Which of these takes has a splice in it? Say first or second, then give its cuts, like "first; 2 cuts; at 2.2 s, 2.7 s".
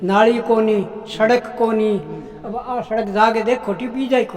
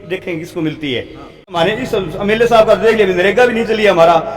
second; 1 cut; at 1.6 s